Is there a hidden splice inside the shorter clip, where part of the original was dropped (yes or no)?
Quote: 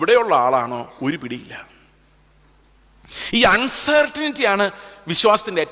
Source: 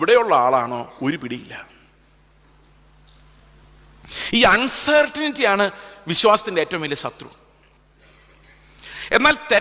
yes